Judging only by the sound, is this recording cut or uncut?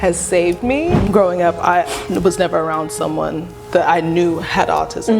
cut